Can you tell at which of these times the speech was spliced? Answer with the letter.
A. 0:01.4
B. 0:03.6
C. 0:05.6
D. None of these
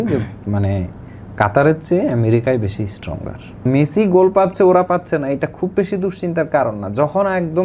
B